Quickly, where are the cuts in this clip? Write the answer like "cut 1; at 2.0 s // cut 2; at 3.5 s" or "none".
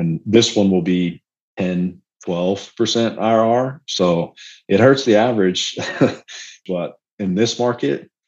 cut 1; at 6.6 s